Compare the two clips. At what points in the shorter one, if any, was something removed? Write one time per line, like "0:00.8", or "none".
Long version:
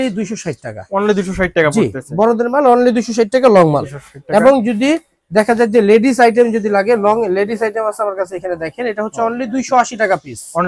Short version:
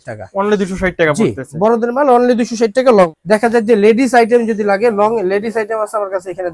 0:03.1